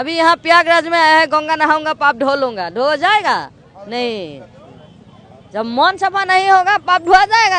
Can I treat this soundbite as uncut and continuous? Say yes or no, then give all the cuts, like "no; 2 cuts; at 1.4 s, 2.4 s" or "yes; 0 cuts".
yes; 0 cuts